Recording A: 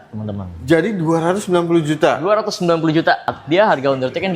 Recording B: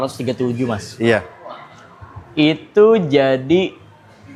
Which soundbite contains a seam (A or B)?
A